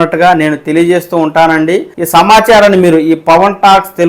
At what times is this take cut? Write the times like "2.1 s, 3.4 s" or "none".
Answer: 1.9 s